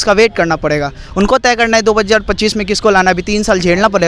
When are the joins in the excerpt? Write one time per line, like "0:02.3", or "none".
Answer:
none

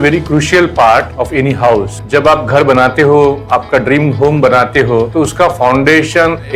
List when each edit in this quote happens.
0:01.7
0:05.1

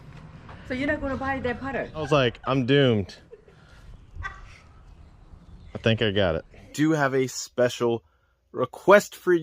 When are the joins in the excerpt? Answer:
0:02.1
0:06.7

